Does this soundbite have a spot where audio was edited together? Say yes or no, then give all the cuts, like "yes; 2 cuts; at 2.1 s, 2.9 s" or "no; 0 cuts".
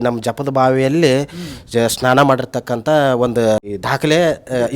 yes; 1 cut; at 3.6 s